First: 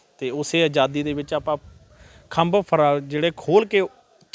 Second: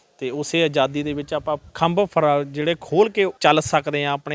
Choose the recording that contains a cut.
second; 2 cuts; at 1.7 s, 3.3 s

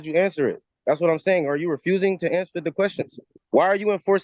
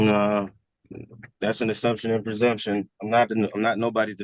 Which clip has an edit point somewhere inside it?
first; 1 cut; at 3.3 s

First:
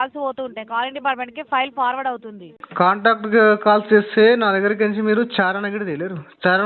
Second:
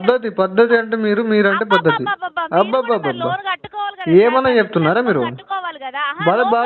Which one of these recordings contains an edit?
first; 1 cut; at 2.6 s

